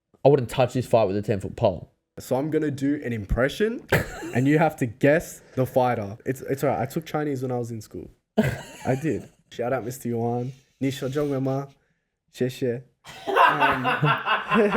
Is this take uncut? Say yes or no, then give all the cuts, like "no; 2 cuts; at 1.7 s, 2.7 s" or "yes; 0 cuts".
no; 3 cuts; at 2.2 s, 6.2 s, 9.5 s